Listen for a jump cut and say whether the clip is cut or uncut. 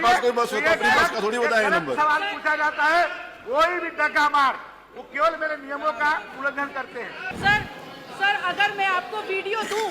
cut